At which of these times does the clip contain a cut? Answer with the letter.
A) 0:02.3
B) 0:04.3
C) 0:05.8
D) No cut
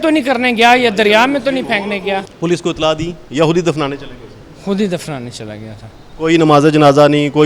A